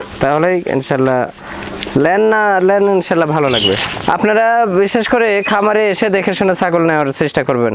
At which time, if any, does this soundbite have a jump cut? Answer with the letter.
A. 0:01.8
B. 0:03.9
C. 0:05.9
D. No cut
B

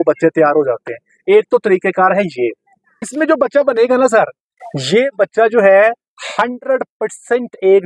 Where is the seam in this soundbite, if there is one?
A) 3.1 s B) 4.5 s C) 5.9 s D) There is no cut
A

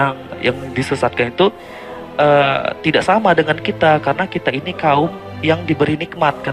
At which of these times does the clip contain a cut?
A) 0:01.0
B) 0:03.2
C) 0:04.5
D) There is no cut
D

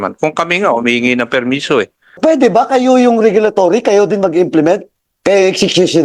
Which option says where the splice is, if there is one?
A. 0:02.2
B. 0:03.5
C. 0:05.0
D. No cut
A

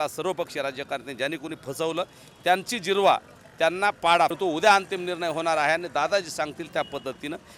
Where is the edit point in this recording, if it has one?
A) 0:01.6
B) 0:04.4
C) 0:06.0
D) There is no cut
B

